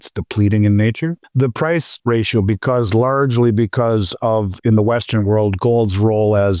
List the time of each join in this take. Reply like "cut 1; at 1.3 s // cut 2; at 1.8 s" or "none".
cut 1; at 1.2 s // cut 2; at 1.9 s